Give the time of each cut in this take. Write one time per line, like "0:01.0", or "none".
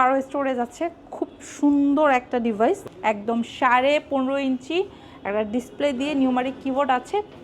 0:02.9

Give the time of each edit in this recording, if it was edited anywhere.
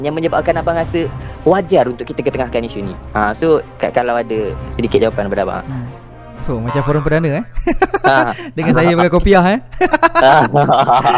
none

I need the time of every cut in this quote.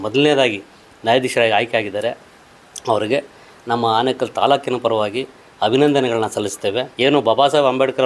0:06.9

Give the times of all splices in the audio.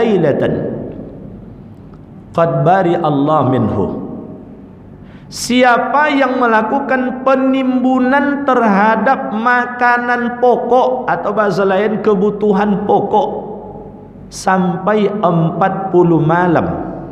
none

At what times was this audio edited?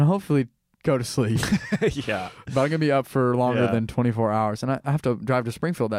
none

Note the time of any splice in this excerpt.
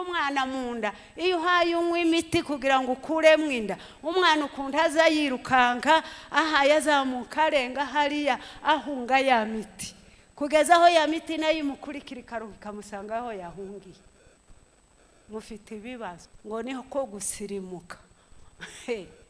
0:16.3

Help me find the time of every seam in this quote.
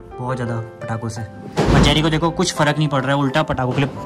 none

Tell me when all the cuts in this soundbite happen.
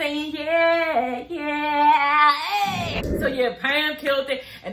0:03.0

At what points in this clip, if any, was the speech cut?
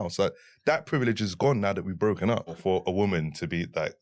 0:02.6

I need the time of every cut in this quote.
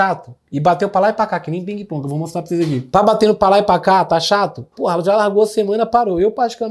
none

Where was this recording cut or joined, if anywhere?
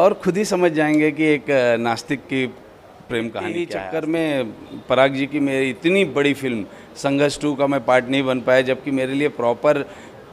0:03.7

